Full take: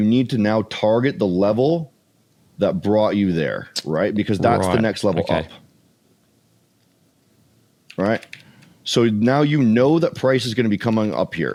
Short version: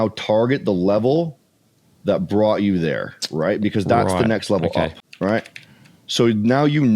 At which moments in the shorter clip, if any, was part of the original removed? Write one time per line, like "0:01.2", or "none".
0:05.0